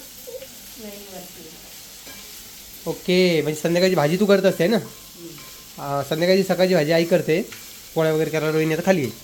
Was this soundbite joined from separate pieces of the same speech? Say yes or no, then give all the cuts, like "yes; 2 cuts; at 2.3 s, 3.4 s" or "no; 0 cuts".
no; 0 cuts